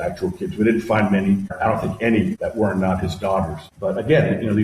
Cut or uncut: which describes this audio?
cut